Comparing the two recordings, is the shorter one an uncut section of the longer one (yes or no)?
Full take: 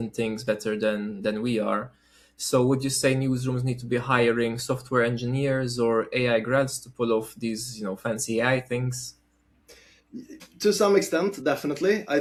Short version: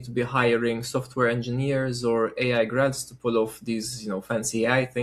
yes